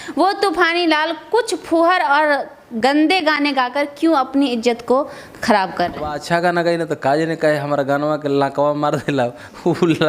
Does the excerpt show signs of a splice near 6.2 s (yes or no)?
yes